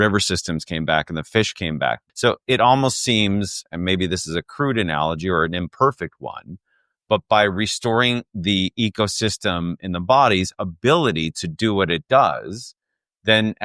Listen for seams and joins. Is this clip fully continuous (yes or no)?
no